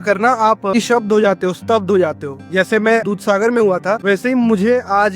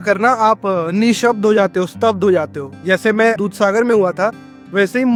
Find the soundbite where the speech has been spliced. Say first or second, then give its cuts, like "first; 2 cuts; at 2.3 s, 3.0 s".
first; 2 cuts; at 0.7 s, 4.0 s